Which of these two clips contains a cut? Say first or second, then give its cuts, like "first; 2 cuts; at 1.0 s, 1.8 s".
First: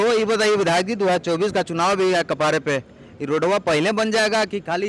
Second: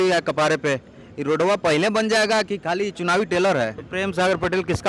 second; 1 cut; at 3.8 s